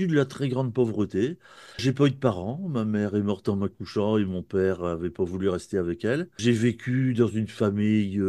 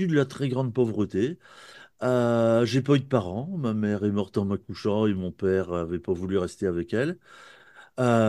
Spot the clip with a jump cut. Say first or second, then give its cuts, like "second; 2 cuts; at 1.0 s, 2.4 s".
first; 2 cuts; at 1.8 s, 6.4 s